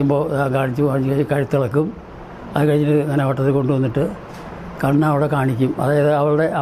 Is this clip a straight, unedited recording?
yes; 0 cuts

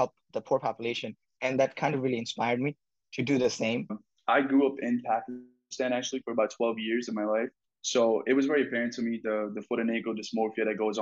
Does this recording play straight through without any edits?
no; 1 cut; at 4.1 s

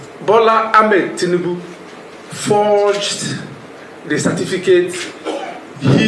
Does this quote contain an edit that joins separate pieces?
no; 0 cuts

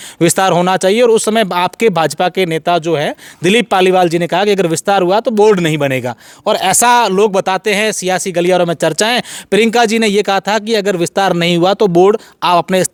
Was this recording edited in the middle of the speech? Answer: no; 0 cuts

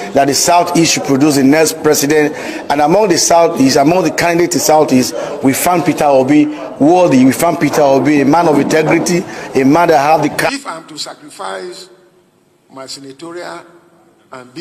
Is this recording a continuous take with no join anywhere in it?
no; 1 cut; at 10.5 s

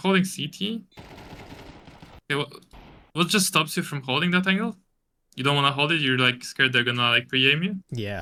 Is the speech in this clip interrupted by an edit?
no; 0 cuts

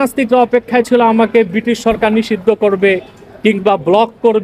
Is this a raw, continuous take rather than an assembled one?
yes; 0 cuts

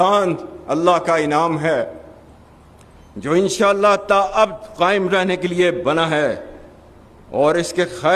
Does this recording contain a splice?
no; 0 cuts

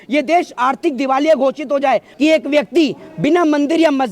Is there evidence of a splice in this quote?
yes; 1 cut; at 2.1 s

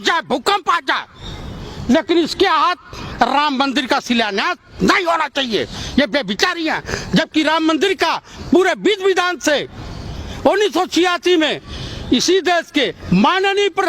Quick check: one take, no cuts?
yes; 0 cuts

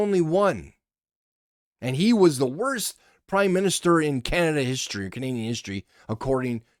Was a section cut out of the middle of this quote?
no; 0 cuts

